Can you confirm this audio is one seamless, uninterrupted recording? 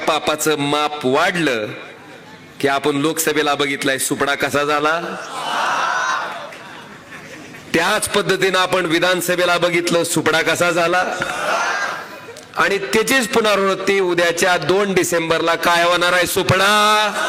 yes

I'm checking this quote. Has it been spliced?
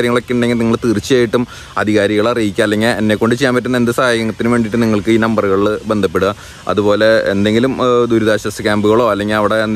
no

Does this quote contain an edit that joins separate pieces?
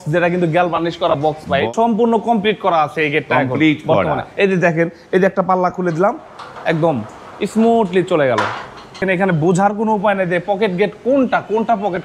yes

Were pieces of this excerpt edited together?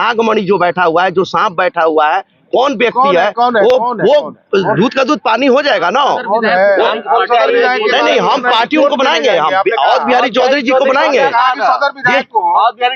no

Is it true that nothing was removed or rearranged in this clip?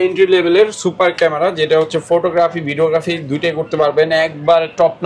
yes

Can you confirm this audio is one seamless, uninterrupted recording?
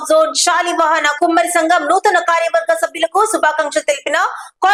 yes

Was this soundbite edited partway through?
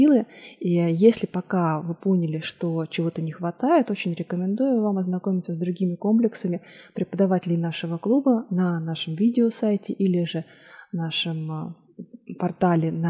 no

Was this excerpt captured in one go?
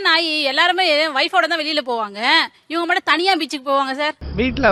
yes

